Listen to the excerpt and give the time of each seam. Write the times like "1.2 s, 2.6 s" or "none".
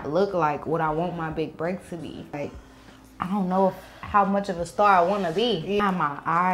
2.4 s, 5.8 s